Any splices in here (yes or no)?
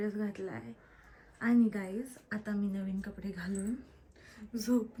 no